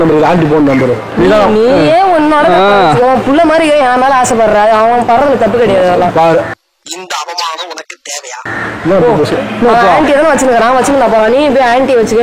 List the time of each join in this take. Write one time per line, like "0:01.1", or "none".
none